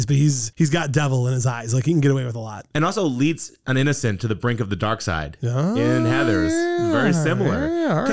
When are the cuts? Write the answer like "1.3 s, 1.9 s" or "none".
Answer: none